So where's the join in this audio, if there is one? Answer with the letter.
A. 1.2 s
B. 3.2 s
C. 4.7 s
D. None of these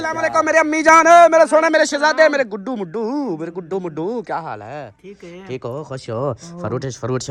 D